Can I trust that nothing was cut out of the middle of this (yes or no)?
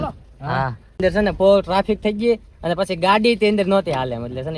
no